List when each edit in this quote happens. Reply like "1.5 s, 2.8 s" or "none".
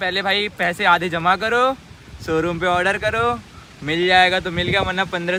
none